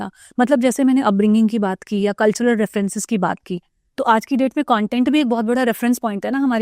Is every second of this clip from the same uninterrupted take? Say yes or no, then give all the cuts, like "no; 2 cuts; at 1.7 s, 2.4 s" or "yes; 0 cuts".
yes; 0 cuts